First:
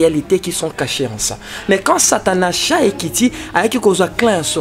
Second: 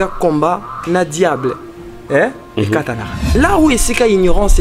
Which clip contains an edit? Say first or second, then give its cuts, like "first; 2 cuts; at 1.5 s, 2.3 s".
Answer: second; 1 cut; at 3.4 s